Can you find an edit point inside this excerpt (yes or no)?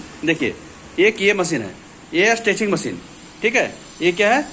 no